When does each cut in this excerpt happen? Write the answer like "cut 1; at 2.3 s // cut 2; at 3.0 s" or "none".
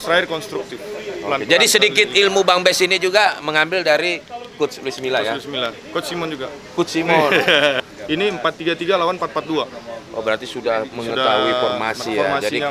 cut 1; at 7.9 s